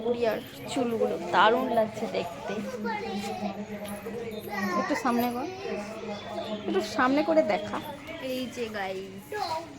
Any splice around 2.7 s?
yes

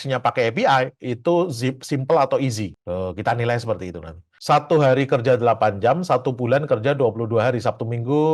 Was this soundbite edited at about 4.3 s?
yes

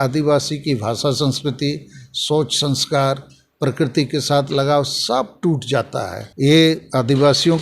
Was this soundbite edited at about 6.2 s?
yes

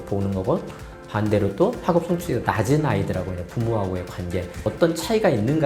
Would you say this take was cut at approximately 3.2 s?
no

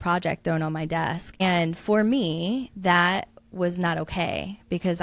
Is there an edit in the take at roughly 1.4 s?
yes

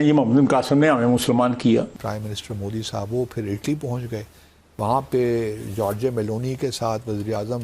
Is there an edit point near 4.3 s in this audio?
no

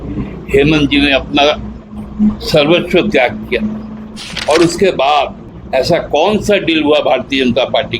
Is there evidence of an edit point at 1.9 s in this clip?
no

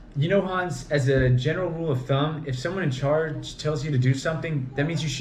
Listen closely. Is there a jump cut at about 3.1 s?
no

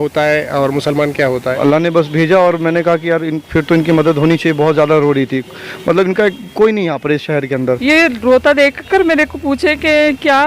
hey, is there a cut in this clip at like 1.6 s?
yes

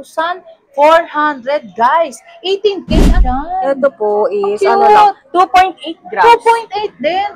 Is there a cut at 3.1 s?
yes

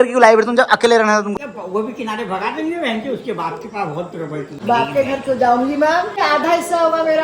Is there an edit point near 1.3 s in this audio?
yes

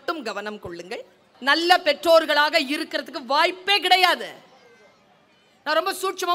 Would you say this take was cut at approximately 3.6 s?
no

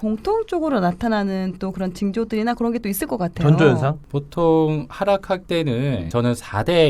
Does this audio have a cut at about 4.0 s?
yes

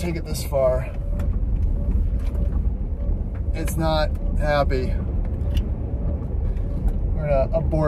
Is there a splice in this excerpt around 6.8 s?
no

